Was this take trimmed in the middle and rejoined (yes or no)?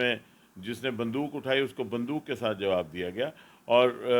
no